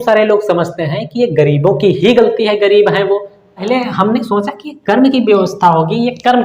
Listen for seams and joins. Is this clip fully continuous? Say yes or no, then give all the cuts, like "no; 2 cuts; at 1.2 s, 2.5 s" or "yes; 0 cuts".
no; 1 cut; at 3.6 s